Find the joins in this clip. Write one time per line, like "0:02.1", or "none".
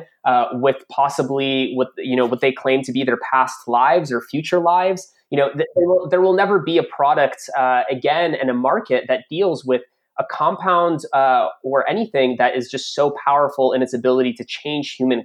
none